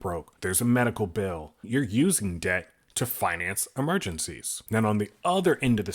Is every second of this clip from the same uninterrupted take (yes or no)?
no